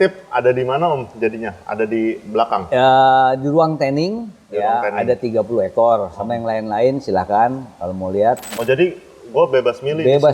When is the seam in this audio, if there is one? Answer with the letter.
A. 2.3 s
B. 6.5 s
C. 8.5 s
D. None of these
C